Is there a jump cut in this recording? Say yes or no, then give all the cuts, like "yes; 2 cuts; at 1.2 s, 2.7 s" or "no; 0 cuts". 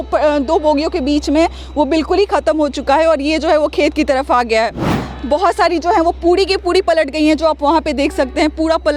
no; 0 cuts